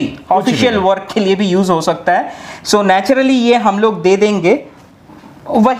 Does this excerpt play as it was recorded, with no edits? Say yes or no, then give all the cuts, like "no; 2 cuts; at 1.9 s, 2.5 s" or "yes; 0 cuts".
yes; 0 cuts